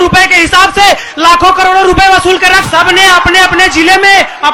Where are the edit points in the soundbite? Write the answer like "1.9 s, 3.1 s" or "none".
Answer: 2.6 s